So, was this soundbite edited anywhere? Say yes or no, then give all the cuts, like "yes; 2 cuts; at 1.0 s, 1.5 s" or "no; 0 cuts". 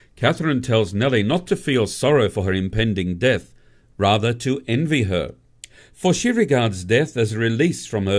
no; 0 cuts